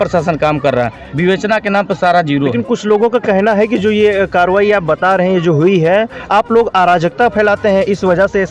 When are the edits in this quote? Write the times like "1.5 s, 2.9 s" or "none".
none